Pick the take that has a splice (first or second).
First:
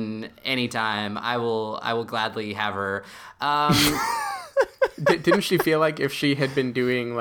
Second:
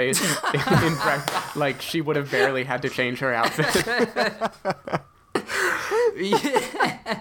first